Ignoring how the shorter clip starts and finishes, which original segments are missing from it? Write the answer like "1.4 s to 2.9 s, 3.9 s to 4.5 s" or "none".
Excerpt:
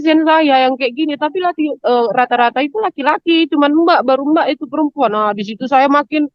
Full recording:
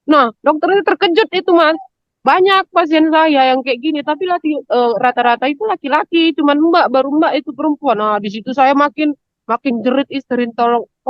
none